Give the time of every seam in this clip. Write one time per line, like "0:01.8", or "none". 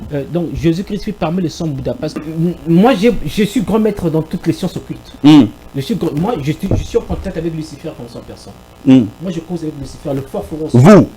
0:02.2